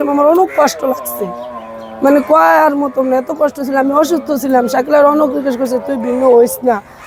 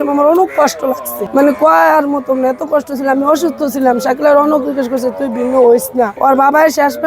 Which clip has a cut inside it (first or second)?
second